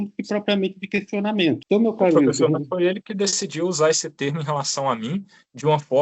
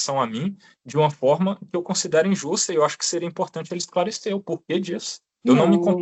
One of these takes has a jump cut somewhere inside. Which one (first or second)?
first